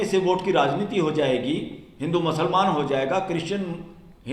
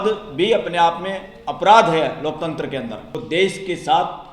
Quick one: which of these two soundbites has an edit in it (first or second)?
second